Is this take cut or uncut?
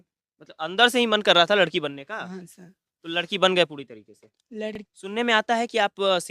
cut